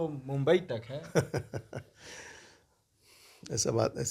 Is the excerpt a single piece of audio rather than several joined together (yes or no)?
yes